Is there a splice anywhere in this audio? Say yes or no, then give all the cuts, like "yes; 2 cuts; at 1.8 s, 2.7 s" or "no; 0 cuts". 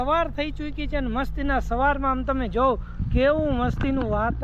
no; 0 cuts